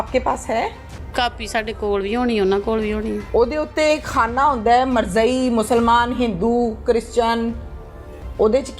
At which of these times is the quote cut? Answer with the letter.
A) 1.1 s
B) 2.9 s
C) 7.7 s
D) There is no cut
A